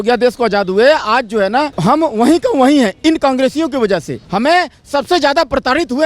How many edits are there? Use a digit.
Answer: 2